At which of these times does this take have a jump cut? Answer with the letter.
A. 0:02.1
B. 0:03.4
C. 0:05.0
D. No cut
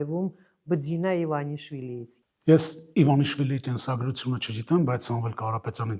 A